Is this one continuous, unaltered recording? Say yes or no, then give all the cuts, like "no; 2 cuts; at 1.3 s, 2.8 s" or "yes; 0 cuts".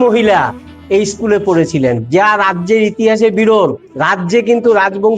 no; 1 cut; at 3.9 s